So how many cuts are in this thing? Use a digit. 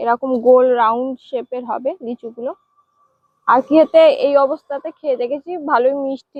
0